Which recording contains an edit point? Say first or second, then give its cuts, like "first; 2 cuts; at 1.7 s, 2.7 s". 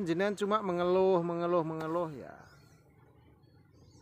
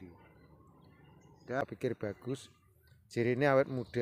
second; 1 cut; at 1.6 s